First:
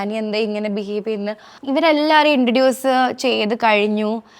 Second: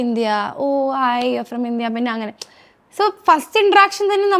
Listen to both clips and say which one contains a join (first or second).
first